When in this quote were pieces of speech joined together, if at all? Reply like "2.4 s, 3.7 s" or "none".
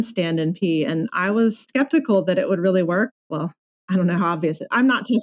1.7 s, 3.1 s

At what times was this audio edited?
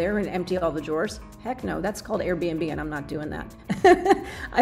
none

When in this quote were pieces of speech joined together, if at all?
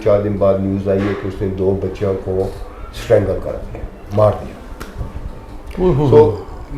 none

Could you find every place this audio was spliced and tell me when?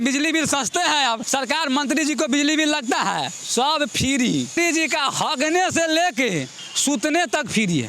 1.2 s, 4.6 s

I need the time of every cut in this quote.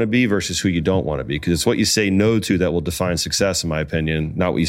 none

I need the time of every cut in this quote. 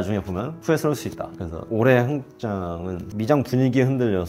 1.4 s, 2.9 s

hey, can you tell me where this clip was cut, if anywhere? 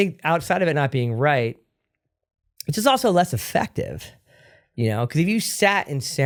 none

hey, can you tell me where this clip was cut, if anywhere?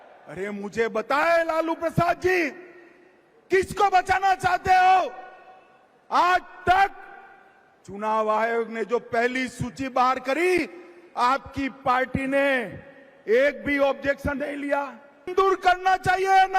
15.3 s

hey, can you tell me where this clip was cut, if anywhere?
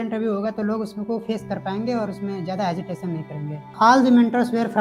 3.6 s

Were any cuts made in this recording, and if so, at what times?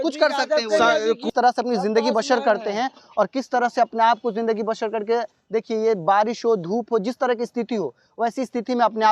1.2 s

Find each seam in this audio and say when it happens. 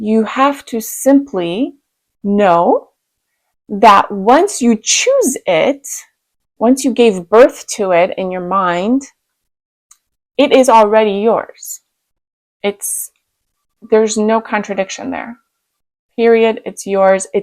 none

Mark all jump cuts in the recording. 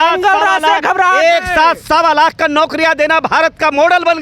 none

